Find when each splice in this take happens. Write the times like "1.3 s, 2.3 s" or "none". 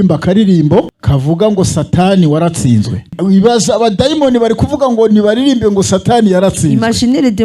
0.9 s, 3.1 s